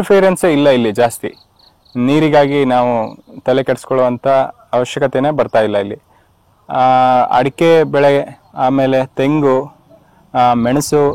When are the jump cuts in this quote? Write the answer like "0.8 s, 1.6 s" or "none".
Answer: none